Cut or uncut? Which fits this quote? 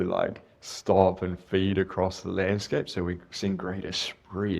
uncut